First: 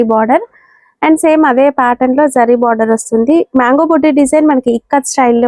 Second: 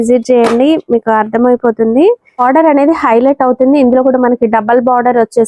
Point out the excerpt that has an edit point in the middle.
second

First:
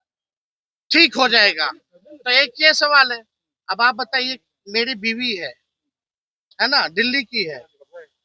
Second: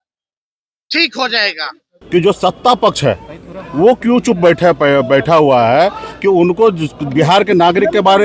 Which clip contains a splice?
second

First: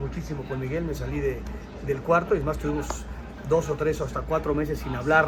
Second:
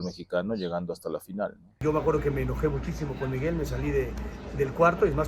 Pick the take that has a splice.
second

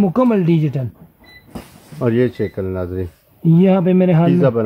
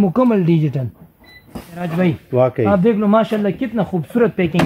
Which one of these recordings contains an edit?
second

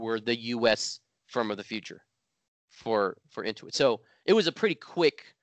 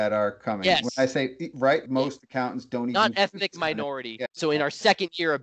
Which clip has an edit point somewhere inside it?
second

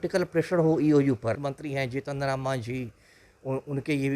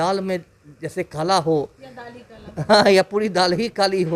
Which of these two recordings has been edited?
first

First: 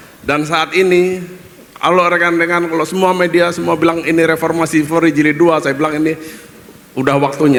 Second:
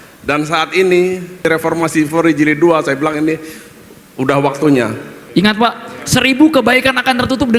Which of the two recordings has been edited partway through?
second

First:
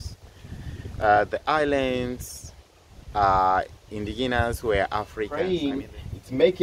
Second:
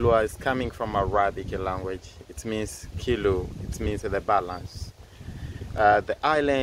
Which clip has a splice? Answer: first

